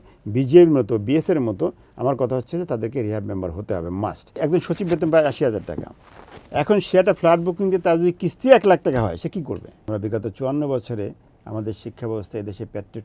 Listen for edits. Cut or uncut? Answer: cut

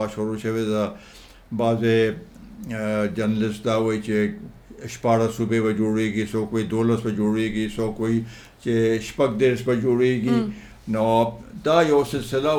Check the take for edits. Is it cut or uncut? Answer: uncut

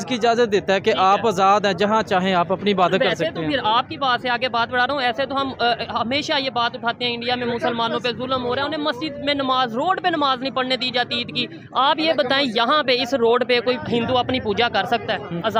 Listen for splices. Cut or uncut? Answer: uncut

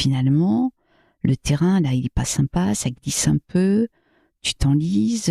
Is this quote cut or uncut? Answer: uncut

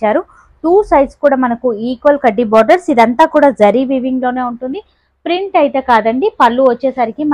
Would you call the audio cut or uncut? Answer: uncut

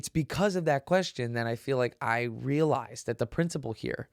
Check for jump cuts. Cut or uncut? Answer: uncut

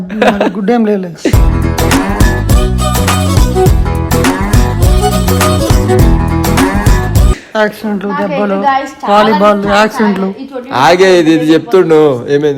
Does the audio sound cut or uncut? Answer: uncut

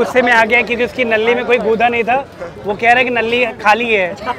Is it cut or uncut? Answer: uncut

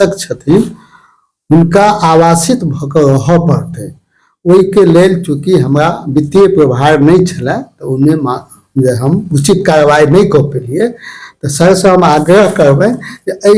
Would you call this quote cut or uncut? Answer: uncut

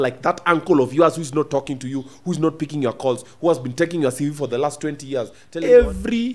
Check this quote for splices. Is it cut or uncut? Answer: cut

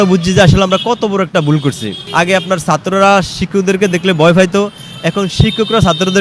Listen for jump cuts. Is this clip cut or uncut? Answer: cut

